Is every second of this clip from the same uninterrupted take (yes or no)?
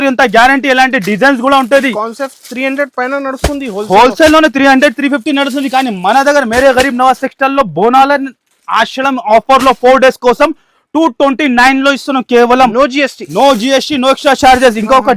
yes